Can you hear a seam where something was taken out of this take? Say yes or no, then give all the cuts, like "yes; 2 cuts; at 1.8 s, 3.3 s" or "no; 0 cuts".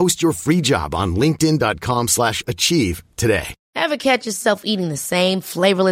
yes; 1 cut; at 3.6 s